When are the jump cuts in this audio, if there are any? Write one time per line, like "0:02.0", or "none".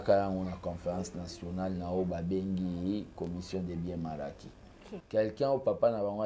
0:04.9